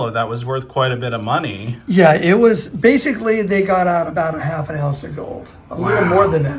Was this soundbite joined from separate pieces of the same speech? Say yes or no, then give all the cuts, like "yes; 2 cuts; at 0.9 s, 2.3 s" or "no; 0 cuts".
no; 0 cuts